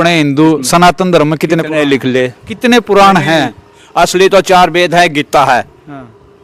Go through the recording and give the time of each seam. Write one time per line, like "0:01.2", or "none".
none